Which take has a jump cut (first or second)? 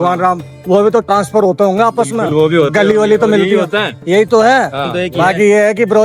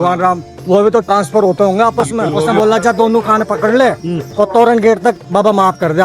second